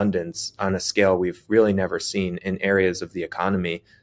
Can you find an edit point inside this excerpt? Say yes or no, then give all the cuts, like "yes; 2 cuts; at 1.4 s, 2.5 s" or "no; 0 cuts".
no; 0 cuts